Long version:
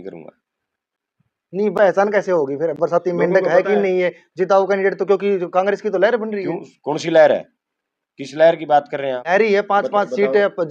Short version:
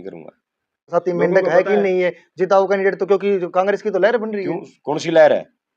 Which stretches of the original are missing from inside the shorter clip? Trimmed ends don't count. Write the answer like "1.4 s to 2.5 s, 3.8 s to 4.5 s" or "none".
0.9 s to 2.9 s